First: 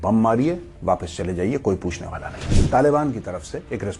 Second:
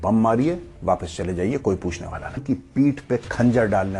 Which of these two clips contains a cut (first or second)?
second